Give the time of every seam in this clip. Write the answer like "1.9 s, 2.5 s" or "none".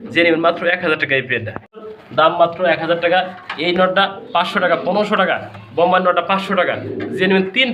2.0 s